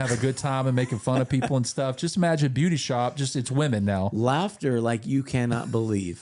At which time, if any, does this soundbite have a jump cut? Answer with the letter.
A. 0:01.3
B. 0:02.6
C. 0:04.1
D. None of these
C